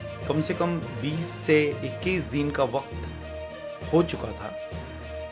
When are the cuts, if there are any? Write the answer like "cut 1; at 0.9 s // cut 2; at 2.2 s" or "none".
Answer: cut 1; at 4.4 s